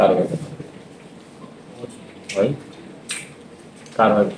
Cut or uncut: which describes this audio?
uncut